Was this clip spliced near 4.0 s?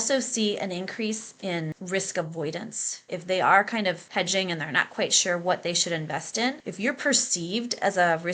yes; 4 cuts; at 1.7 s, 3.0 s, 4.0 s, 6.6 s

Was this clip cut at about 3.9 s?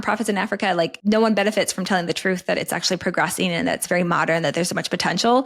no; 1 cut; at 1.0 s

